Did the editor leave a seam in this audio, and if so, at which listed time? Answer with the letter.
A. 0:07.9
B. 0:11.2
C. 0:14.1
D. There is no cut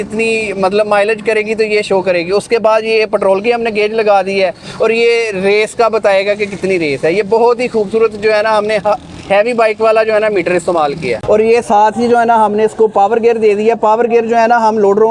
B